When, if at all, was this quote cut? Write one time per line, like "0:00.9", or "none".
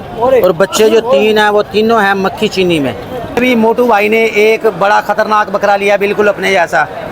0:03.3